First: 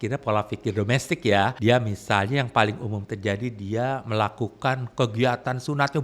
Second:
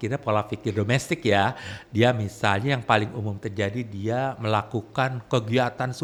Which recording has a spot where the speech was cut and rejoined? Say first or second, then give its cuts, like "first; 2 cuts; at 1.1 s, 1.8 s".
first; 1 cut; at 1.5 s